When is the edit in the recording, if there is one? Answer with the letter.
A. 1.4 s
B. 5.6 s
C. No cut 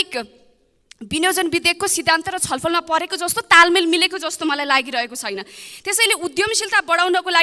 C